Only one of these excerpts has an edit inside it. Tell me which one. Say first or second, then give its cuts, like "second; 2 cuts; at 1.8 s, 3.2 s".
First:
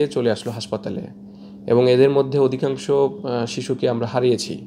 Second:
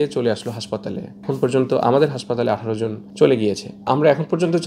second; 3 cuts; at 1.2 s, 3.0 s, 3.9 s